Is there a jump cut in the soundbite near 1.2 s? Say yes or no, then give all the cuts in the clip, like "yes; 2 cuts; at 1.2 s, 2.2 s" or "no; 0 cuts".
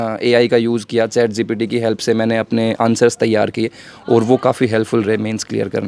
no; 0 cuts